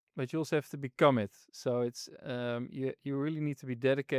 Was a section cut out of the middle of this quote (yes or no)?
no